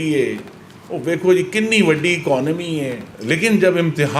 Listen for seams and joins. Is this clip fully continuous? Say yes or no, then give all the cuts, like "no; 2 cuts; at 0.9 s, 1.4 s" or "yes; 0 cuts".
no; 1 cut; at 3.1 s